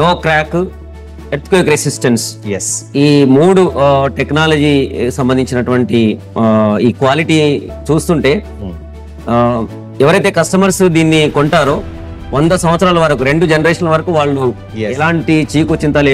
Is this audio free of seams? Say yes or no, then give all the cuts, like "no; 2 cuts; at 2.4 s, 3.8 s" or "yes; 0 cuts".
yes; 0 cuts